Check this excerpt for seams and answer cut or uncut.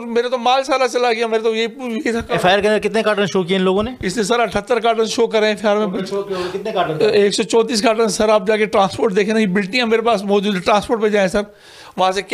uncut